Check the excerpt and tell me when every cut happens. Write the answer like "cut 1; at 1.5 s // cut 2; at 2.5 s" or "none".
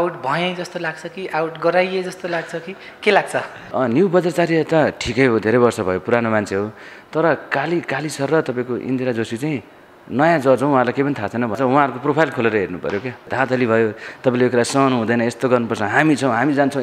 cut 1; at 3.6 s // cut 2; at 11.6 s // cut 3; at 13.3 s